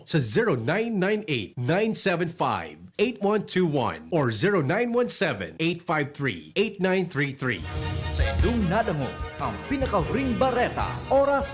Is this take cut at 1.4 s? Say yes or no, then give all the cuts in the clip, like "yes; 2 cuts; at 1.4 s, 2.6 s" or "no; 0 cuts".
no; 0 cuts